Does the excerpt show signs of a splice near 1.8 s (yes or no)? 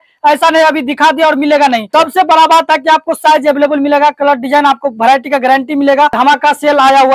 yes